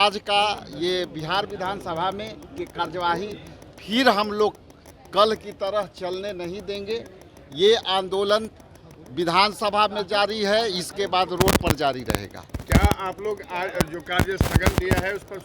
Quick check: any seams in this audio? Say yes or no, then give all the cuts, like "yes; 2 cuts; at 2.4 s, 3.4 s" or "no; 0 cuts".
no; 0 cuts